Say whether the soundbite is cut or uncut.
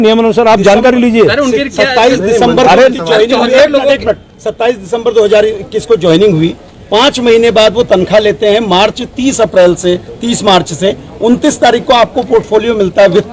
uncut